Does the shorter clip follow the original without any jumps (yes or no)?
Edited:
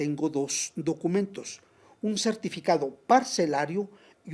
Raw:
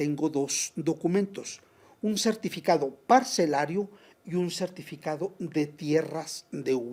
yes